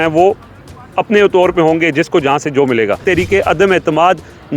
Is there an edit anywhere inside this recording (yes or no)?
yes